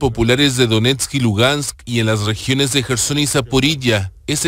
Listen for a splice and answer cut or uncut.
uncut